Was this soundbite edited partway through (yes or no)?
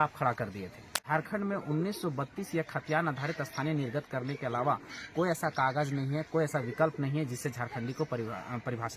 yes